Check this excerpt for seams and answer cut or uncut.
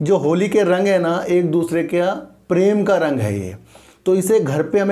uncut